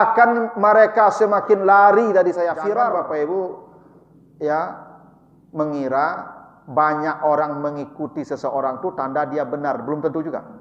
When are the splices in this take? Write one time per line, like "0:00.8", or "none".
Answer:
0:02.9

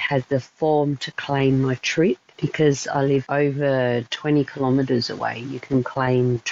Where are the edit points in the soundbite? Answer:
0:02.4
0:03.3

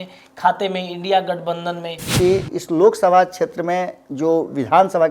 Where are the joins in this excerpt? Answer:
0:02.1

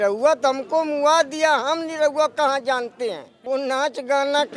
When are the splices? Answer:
0:03.3

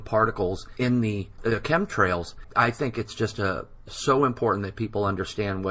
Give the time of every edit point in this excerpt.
0:01.1

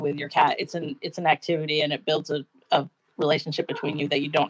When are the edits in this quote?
none

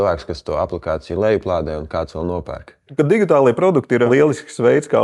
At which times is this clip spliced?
0:02.9
0:04.1

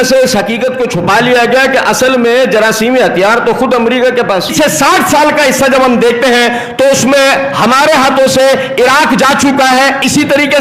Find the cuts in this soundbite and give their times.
0:04.5

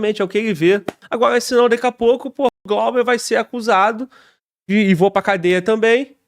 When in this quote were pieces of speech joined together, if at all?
0:01.0

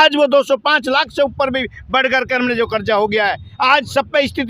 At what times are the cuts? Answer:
none

